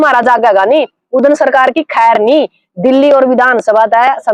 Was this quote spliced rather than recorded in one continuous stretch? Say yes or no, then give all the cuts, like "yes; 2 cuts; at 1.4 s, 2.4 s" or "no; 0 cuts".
no; 0 cuts